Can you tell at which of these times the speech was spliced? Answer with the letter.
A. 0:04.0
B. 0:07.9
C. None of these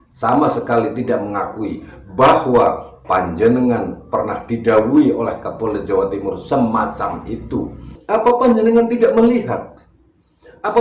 B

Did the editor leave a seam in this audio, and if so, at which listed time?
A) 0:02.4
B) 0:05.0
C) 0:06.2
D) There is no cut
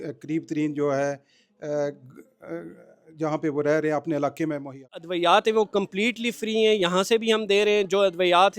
B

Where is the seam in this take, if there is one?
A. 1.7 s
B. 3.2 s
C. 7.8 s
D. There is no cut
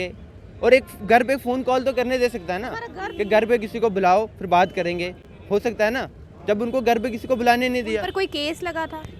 D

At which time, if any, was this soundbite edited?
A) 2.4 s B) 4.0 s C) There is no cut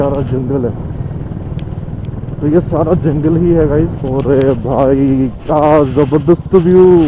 B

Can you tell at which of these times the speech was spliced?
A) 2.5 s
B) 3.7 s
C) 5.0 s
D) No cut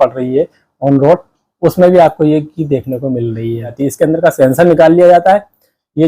B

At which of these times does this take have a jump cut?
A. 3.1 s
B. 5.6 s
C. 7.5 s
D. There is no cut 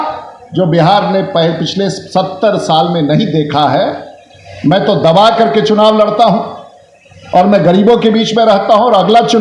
D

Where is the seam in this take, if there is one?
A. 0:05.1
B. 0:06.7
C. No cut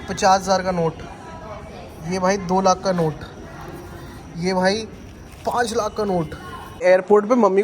B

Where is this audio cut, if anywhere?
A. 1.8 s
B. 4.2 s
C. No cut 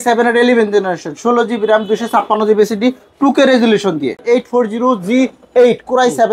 B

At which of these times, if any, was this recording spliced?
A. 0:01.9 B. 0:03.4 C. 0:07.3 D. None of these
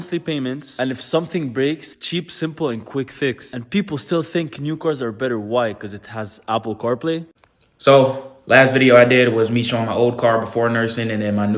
C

